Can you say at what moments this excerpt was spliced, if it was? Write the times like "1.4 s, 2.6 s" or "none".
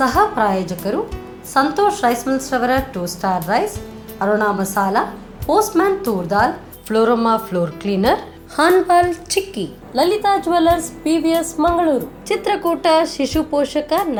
none